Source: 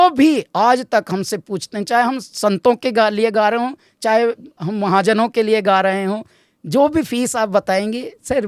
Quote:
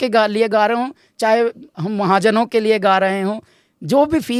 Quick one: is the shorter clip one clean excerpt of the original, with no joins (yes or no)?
yes